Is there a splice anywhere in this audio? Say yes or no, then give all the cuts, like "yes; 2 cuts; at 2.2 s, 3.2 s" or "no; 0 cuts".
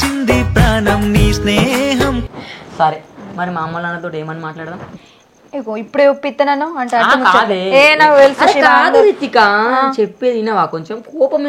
no; 0 cuts